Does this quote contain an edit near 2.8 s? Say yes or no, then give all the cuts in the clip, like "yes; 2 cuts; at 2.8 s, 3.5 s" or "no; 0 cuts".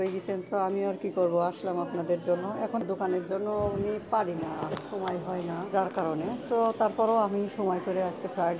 yes; 2 cuts; at 2.8 s, 5.7 s